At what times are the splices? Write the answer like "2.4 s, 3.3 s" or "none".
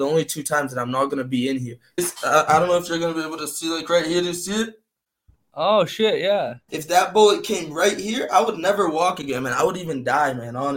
2.0 s, 6.7 s